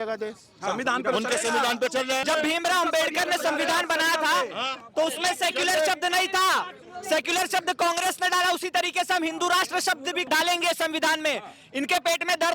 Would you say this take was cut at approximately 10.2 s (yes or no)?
yes